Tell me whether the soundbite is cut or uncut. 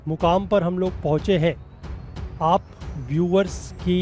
uncut